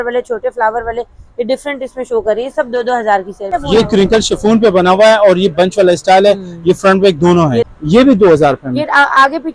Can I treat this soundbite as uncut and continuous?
no; 2 cuts; at 3.5 s, 7.7 s

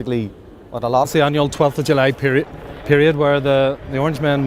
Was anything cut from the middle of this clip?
no; 0 cuts

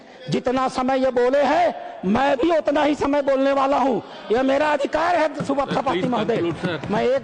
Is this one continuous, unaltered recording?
yes; 0 cuts

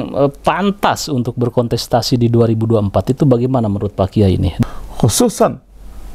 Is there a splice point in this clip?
yes; 1 cut; at 4.8 s

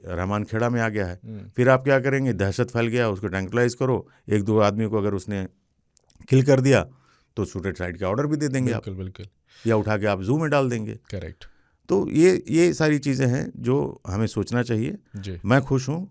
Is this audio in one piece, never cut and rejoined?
yes; 0 cuts

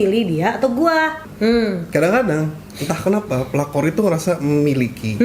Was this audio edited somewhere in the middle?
yes; 1 cut; at 1.2 s

